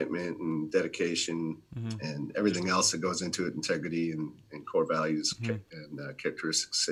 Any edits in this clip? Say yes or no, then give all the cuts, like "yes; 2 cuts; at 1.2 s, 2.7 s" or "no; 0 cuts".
no; 0 cuts